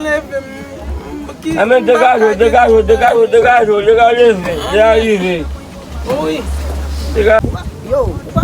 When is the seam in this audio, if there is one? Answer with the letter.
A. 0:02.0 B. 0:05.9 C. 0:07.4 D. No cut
C